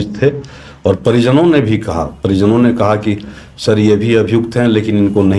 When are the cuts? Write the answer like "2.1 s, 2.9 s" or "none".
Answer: none